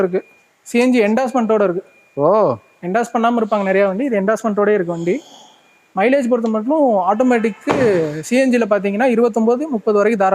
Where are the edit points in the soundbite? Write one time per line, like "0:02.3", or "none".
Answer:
none